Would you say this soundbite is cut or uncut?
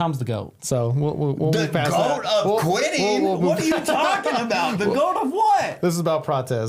uncut